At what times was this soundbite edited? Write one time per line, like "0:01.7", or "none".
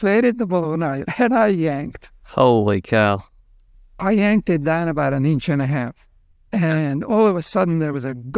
0:01.0